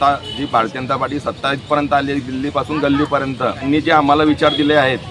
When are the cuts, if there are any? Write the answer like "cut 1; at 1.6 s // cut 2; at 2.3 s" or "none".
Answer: cut 1; at 3.6 s